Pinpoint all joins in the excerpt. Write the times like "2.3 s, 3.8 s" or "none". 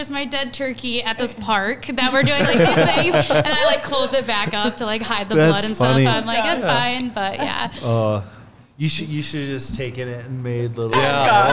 none